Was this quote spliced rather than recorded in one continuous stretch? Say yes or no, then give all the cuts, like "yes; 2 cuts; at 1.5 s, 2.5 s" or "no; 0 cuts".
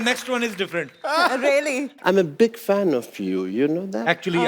yes; 1 cut; at 1.9 s